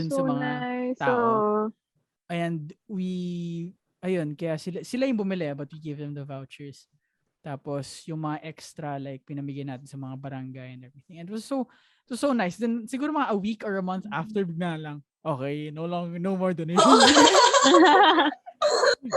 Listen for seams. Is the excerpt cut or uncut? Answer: uncut